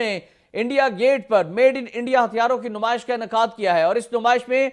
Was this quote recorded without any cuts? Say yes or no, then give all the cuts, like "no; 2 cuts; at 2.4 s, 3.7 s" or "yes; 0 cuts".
yes; 0 cuts